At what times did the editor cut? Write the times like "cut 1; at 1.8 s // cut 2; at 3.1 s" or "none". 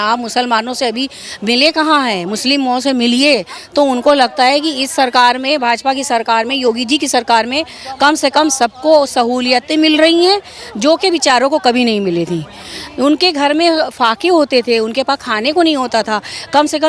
none